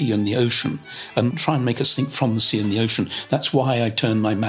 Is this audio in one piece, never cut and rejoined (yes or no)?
no